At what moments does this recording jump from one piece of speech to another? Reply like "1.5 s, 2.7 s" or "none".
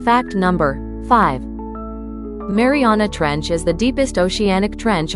0.9 s